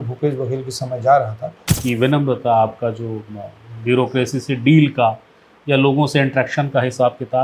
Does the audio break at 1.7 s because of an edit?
yes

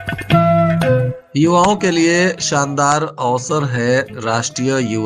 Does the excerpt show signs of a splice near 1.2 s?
yes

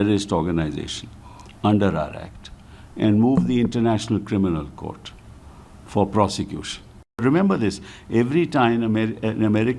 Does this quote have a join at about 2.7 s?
no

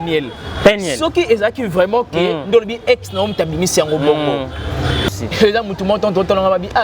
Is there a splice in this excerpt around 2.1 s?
no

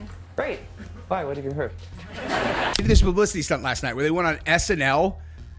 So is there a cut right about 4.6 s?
no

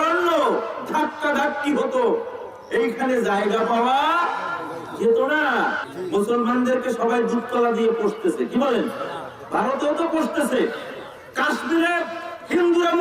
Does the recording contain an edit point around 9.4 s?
no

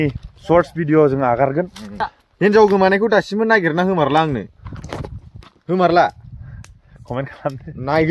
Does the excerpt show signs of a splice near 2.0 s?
yes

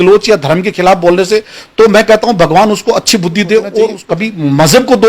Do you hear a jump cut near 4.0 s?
yes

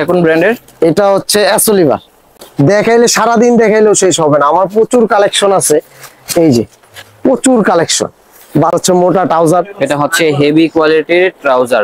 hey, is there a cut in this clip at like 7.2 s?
no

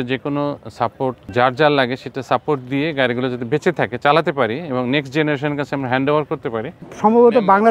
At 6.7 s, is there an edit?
yes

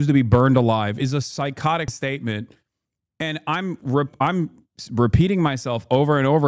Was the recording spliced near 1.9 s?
yes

